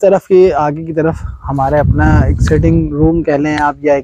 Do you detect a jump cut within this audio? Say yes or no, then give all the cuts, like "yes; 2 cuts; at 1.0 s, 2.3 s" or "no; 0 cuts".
no; 0 cuts